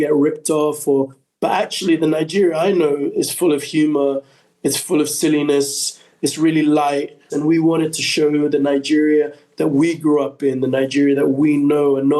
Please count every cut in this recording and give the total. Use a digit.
1